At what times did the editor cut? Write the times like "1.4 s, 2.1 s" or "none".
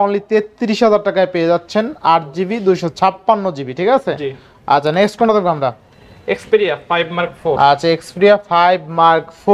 none